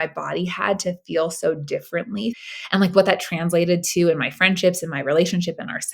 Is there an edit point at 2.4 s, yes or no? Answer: yes